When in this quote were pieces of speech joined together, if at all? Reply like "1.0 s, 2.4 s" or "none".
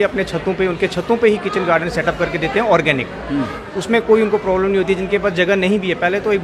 none